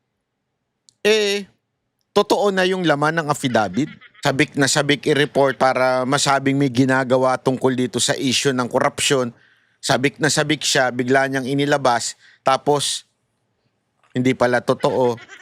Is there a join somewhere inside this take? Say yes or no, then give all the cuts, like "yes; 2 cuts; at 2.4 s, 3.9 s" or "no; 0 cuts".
yes; 1 cut; at 4.0 s